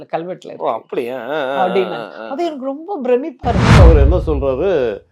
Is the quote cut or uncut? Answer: cut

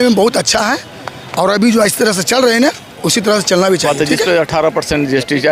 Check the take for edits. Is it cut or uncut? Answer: cut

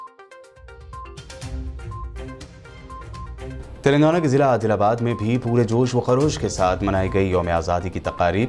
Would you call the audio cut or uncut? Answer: cut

